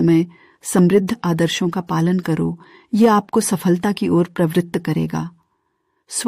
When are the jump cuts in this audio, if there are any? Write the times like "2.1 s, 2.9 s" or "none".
none